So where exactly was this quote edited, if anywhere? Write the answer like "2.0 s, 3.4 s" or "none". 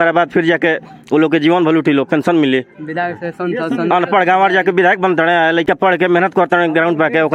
none